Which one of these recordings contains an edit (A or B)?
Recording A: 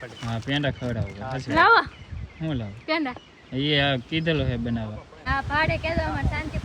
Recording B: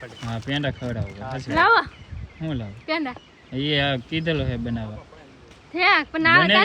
A